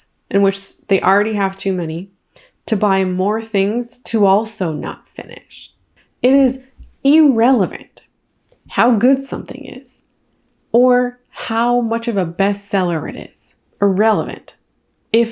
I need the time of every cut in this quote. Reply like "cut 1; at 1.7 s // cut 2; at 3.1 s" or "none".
cut 1; at 6.0 s

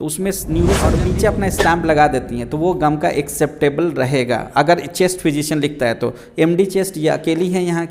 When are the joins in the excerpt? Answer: cut 1; at 1.1 s

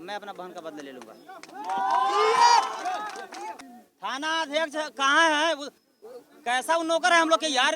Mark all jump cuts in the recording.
cut 1; at 3.7 s

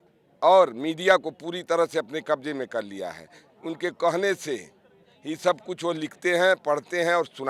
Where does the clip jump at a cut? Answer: none

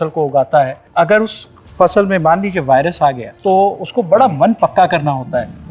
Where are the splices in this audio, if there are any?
cut 1; at 0.8 s // cut 2; at 3.3 s

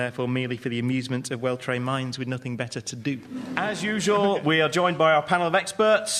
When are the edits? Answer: none

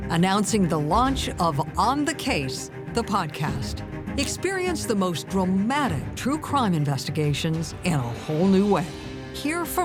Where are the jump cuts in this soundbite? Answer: none

